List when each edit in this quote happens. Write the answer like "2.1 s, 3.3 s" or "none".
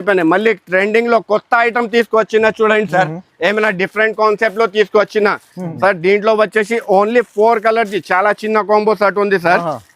5.6 s